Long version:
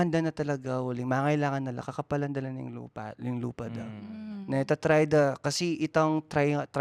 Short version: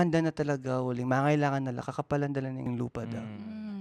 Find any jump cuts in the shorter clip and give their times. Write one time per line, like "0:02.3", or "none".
0:02.7